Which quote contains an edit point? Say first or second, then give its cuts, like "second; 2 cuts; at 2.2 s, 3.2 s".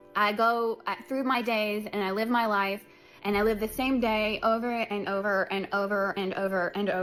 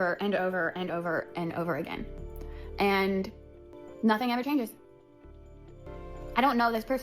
second; 2 cuts; at 3.7 s, 5.9 s